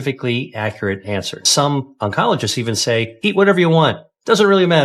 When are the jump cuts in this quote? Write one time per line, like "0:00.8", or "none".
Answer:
0:01.5
0:03.1